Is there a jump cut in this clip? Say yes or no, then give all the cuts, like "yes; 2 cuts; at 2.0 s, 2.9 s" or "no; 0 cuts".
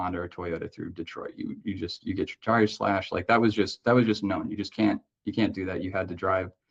no; 0 cuts